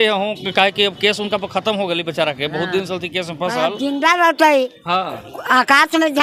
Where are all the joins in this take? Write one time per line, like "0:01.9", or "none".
none